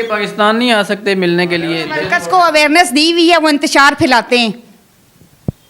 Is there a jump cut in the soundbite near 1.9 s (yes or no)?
yes